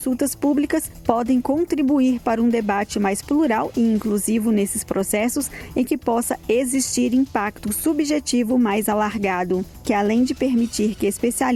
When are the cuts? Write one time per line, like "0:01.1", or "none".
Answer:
none